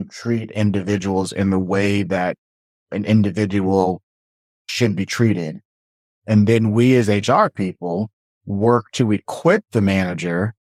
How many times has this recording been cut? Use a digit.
0